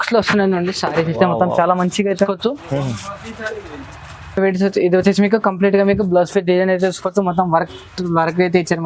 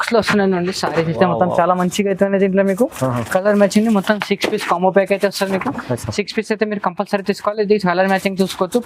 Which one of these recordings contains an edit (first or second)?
first